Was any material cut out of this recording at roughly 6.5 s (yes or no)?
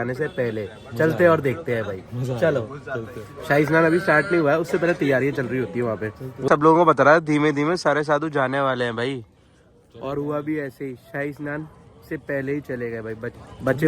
yes